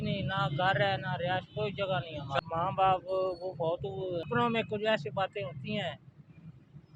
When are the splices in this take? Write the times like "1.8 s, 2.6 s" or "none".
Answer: 2.4 s, 4.3 s